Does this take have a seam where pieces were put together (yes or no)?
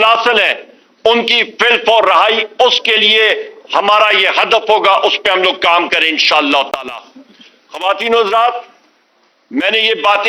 no